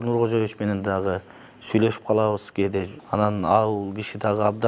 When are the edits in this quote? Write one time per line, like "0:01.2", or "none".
0:03.0